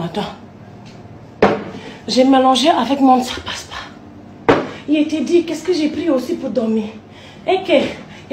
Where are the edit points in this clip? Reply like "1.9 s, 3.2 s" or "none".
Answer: 1.5 s, 2.7 s